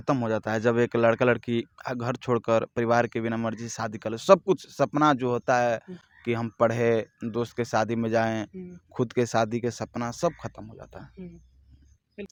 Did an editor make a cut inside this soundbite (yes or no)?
no